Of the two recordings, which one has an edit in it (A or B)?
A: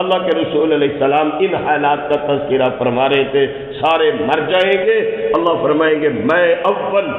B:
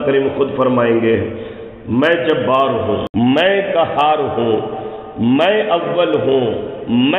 B